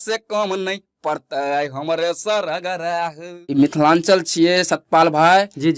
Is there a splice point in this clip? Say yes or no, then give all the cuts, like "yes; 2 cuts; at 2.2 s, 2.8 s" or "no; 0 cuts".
yes; 1 cut; at 3.5 s